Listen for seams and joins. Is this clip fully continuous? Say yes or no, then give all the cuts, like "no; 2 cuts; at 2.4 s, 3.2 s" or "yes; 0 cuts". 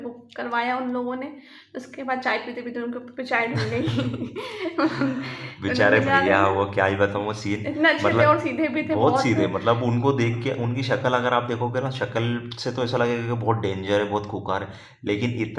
yes; 0 cuts